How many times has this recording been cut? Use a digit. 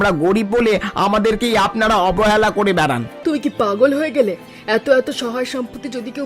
1